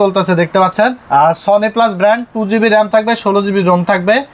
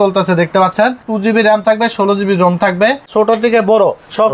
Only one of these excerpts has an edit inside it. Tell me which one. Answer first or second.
second